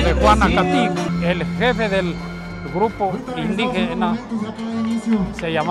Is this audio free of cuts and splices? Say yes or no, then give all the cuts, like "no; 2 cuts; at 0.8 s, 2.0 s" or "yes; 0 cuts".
no; 1 cut; at 1.1 s